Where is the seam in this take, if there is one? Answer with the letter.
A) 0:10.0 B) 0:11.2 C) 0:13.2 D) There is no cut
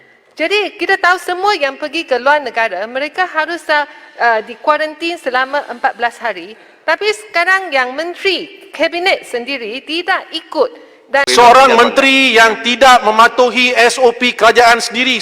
B